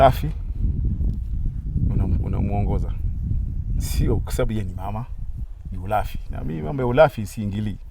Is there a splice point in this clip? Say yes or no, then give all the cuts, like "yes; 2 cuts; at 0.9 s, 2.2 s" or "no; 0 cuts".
no; 0 cuts